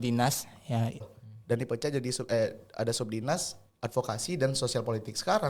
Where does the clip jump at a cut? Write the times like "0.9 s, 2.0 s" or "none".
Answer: 1.1 s